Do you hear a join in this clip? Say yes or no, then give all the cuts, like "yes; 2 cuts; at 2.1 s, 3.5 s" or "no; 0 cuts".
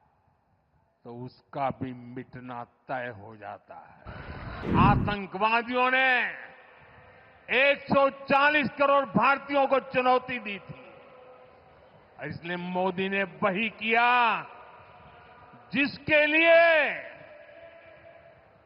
yes; 1 cut; at 4.6 s